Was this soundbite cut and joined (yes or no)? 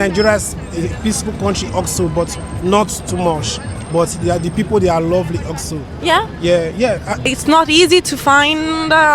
yes